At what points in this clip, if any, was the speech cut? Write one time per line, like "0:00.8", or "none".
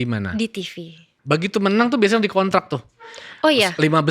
0:01.1